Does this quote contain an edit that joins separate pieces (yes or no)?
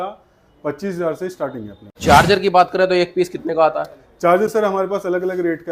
yes